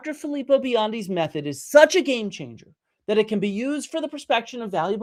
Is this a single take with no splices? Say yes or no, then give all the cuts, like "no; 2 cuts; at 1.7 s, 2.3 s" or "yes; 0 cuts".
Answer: yes; 0 cuts